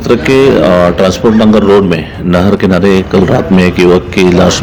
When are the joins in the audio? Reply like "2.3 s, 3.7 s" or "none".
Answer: none